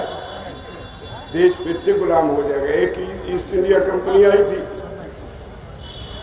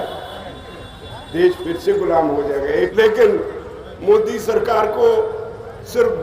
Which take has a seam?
second; 1 cut; at 2.9 s

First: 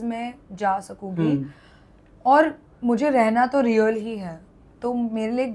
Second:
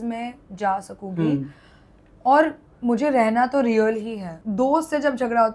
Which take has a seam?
second; 1 cut; at 4.3 s

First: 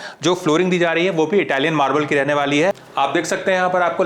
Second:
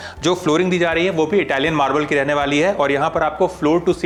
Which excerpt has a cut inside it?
first; 1 cut; at 2.8 s

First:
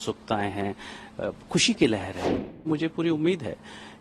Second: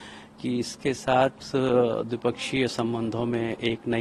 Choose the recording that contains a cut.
first; 1 cut; at 2.6 s

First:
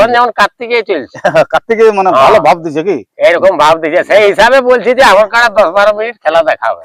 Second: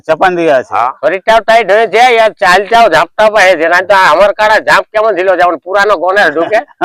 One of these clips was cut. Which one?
second; 1 cut; at 0.9 s

